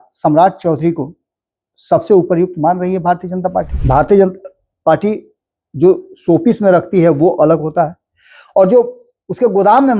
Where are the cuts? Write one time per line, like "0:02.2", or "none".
0:03.8